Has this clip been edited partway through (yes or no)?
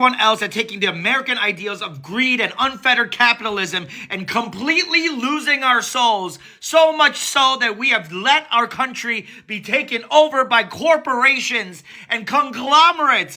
no